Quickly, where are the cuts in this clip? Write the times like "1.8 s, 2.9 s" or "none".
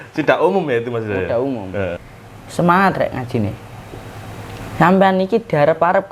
2.0 s